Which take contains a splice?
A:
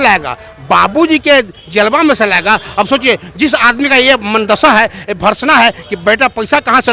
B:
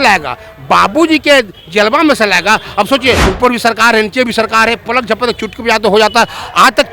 B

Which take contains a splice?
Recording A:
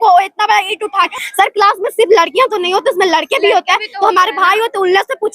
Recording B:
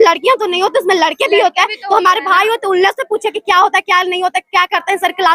A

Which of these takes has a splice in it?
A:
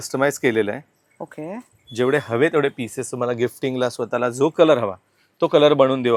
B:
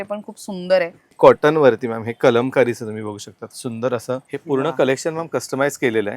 B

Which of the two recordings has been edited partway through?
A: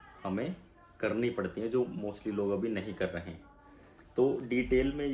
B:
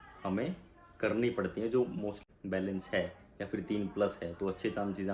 B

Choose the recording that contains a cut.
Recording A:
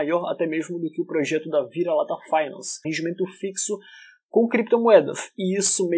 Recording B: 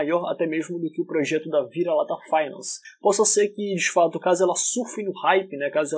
B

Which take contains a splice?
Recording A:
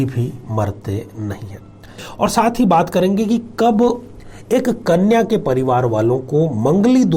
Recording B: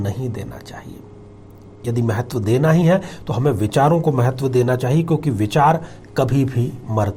A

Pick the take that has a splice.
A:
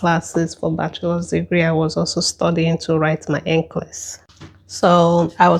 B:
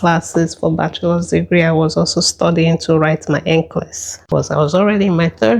B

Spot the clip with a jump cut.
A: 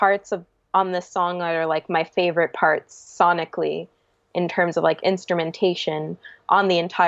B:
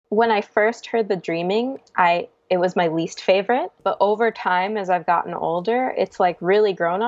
B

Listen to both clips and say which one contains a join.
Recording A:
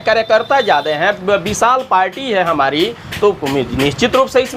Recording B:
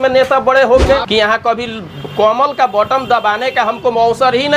B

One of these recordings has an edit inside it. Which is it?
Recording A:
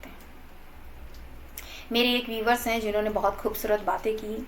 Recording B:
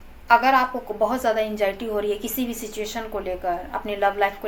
A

